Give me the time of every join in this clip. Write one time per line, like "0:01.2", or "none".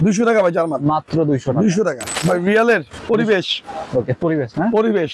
0:02.2
0:02.9